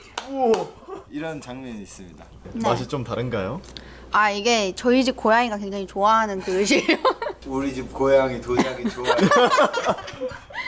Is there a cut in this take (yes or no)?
yes